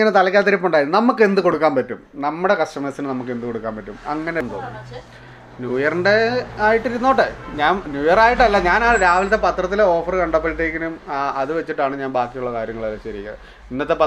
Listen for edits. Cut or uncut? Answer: cut